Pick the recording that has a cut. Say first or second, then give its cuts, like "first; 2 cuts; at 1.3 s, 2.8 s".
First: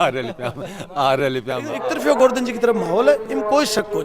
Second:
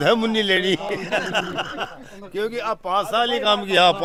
first; 1 cut; at 1.7 s